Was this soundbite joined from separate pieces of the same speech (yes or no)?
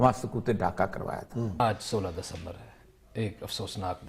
yes